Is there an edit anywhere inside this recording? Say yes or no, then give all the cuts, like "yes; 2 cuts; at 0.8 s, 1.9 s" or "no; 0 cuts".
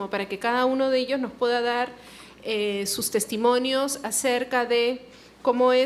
yes; 1 cut; at 1.7 s